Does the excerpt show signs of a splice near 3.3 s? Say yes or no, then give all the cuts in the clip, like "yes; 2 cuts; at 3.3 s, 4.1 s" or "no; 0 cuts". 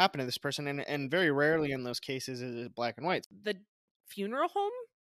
yes; 1 cut; at 3.3 s